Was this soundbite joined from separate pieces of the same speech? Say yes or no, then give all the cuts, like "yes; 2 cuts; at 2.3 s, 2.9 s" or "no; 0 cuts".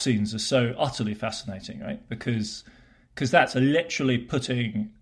no; 0 cuts